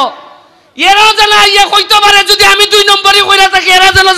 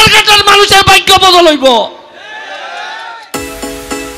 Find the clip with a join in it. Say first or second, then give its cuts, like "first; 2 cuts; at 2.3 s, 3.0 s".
second; 1 cut; at 3.1 s